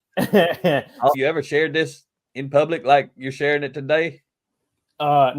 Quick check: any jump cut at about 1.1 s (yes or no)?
yes